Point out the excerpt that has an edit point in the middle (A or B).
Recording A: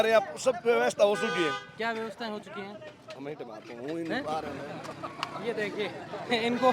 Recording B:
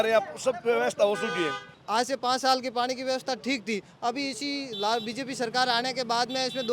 B